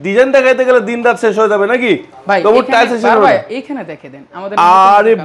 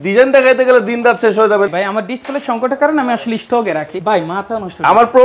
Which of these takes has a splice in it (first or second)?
second